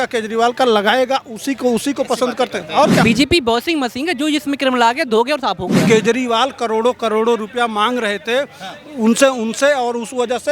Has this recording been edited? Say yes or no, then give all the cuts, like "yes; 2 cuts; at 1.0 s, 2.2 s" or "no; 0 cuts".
yes; 2 cuts; at 3.0 s, 5.8 s